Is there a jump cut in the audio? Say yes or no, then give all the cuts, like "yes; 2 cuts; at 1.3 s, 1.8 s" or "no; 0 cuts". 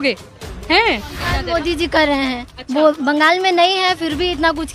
yes; 1 cut; at 1.3 s